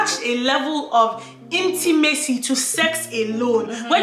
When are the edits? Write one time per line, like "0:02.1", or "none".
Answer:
none